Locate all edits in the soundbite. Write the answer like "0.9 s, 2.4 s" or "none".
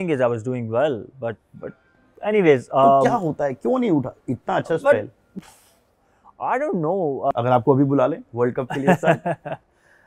7.3 s